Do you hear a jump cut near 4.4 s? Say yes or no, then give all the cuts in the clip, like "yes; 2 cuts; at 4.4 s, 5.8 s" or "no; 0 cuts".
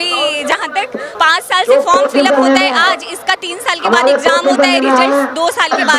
no; 1 cut; at 1.1 s